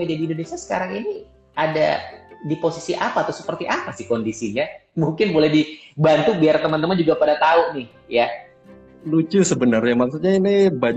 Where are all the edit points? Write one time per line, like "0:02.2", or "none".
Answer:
none